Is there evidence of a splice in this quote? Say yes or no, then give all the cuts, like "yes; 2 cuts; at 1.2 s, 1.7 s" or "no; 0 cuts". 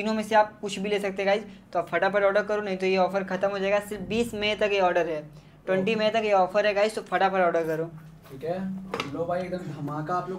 no; 0 cuts